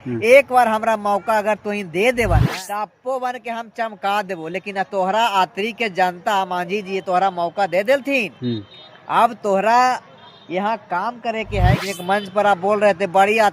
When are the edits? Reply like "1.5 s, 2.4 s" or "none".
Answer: 2.5 s, 11.8 s